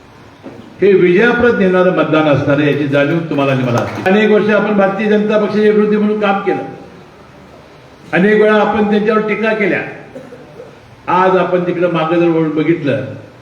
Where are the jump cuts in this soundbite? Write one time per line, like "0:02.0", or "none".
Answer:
0:04.1